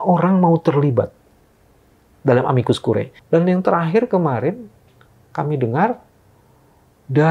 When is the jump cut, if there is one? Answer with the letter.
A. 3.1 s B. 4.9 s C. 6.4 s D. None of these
A